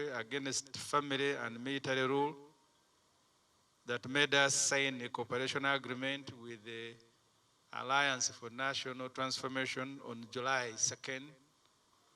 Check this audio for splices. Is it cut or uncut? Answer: uncut